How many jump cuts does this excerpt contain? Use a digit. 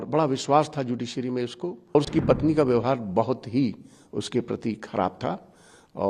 1